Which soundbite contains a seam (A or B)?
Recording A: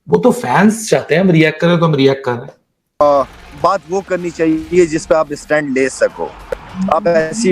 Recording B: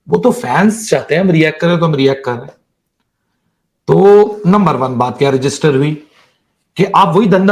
A